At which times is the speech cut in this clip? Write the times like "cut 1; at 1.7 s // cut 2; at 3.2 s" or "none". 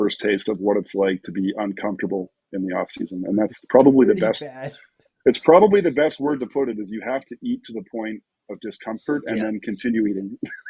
none